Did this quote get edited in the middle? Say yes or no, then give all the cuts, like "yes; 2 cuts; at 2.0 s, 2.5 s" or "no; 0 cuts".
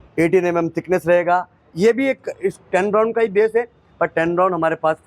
yes; 1 cut; at 1.7 s